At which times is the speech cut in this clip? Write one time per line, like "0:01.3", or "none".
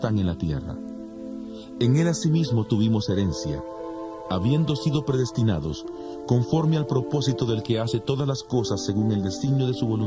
0:07.5